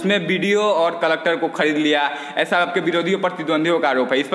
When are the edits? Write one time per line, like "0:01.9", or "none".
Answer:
none